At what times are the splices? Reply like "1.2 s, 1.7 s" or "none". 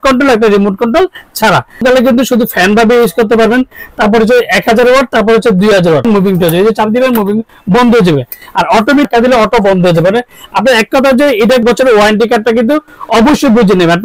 1.8 s, 6.0 s, 9.1 s, 11.4 s